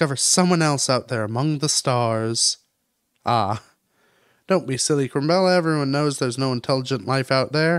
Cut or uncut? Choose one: uncut